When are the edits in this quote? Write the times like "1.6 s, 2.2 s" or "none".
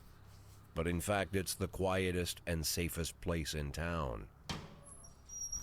4.5 s